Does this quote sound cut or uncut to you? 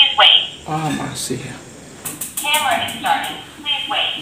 cut